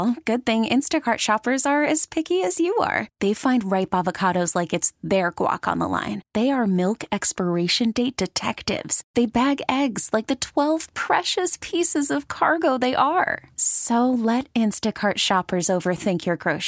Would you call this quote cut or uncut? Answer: uncut